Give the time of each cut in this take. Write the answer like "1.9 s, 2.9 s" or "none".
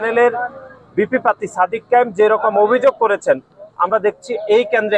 none